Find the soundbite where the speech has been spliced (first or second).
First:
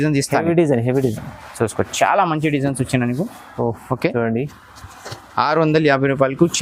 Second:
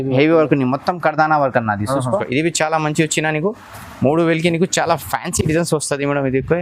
second